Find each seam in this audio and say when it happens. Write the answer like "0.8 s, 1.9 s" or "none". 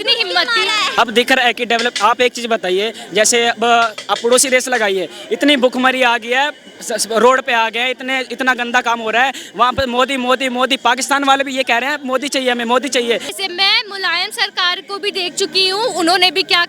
0.9 s, 13.3 s

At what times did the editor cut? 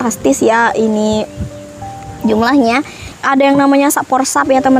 3.1 s

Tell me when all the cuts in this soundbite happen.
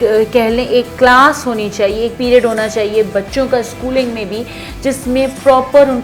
none

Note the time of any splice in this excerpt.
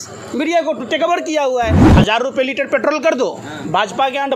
1.8 s

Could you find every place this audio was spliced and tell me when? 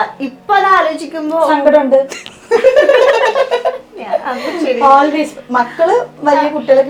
none

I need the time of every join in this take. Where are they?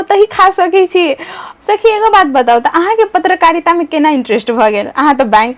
1.4 s

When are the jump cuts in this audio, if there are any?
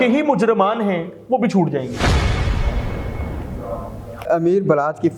4.3 s

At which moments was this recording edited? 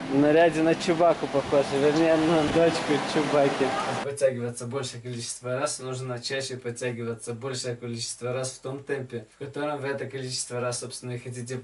2.5 s, 4.0 s, 9.4 s

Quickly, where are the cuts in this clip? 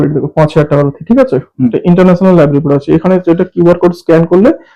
1.7 s

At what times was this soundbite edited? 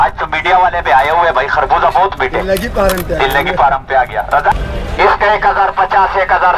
4.5 s

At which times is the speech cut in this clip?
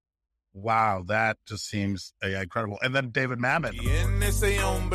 3.8 s

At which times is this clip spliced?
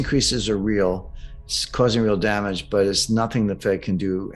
none

